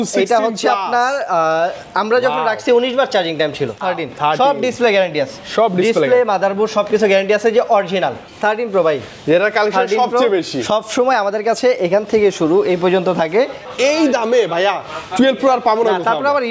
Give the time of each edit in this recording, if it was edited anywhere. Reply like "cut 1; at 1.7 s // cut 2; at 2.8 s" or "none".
cut 1; at 3.8 s // cut 2; at 8.2 s // cut 3; at 13.7 s